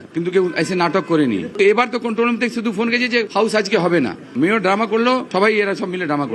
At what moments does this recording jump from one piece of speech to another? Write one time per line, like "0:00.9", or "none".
0:03.3
0:05.3